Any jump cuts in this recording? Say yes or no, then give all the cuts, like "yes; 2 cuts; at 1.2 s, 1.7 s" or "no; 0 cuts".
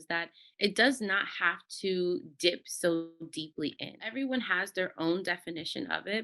yes; 1 cut; at 4.1 s